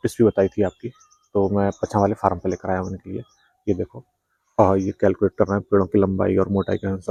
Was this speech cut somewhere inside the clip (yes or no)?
no